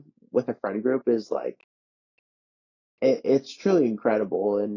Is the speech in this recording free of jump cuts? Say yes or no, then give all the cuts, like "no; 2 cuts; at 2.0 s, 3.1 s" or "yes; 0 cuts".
yes; 0 cuts